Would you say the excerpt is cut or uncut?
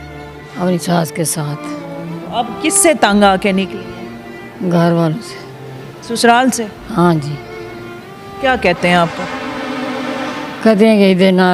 uncut